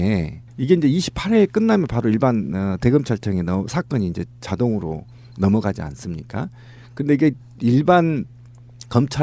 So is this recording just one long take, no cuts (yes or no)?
no